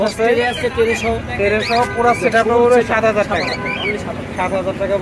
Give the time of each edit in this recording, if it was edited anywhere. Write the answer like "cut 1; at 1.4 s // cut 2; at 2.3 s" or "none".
none